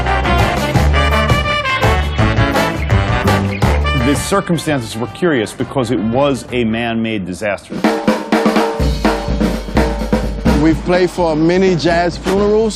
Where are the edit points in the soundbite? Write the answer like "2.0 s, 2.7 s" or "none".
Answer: 10.9 s